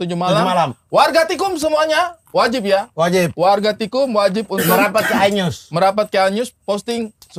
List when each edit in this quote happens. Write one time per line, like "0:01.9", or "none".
none